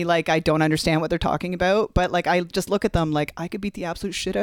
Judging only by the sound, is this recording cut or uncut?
uncut